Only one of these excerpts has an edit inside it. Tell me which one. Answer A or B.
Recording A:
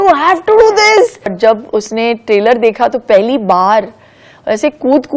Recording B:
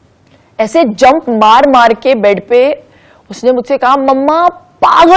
A